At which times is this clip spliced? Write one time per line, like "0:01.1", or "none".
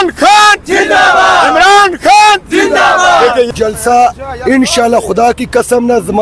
0:03.5